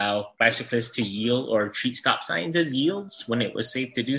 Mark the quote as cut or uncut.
uncut